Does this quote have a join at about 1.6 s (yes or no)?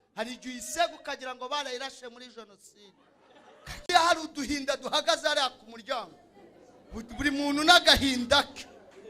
no